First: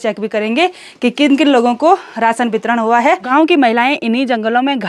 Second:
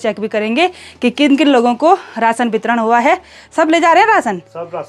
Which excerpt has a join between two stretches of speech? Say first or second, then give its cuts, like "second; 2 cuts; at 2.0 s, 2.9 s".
first; 1 cut; at 3.2 s